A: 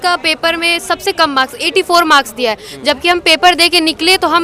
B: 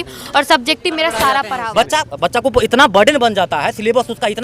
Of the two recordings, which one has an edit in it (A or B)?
B